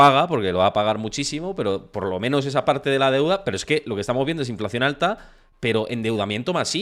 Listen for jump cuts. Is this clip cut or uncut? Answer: uncut